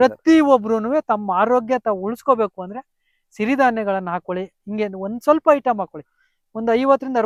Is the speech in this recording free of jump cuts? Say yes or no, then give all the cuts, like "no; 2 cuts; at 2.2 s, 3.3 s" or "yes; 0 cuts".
yes; 0 cuts